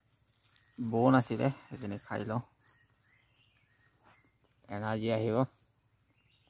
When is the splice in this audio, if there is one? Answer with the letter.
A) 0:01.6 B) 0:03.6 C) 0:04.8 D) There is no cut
D